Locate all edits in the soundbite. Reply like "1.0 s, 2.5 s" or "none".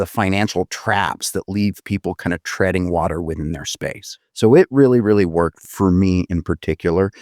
4.1 s, 5.6 s